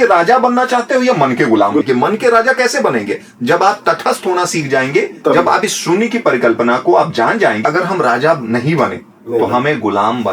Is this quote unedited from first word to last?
no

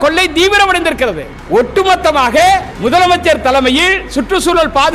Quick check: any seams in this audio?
yes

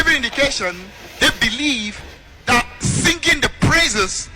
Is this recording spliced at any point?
yes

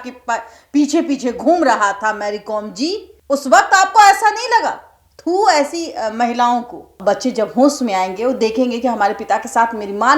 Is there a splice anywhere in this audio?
yes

